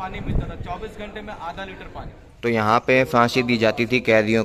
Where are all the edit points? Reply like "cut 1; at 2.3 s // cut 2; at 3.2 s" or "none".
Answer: cut 1; at 2.2 s